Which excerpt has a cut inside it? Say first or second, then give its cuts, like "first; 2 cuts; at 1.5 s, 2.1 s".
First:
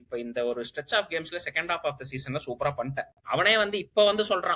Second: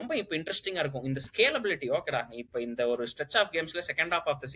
first; 1 cut; at 3.1 s